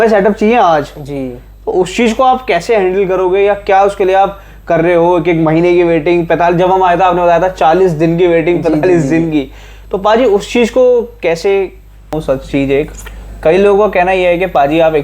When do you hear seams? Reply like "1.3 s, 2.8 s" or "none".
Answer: 12.2 s